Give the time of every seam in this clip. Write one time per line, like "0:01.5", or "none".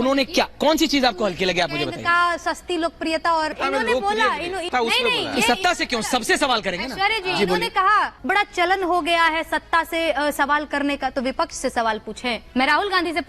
none